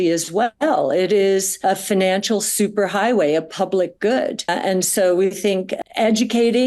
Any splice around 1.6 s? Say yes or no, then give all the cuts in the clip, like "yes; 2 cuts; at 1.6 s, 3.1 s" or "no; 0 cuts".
yes; 1 cut; at 1.6 s